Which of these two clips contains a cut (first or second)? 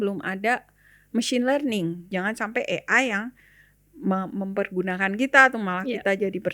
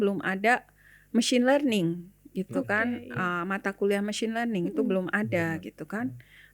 first